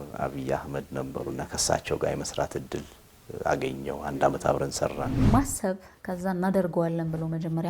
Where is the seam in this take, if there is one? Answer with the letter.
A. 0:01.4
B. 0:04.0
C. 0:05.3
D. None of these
C